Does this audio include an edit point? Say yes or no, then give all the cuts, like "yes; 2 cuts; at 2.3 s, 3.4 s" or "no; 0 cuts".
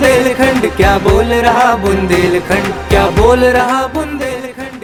no; 0 cuts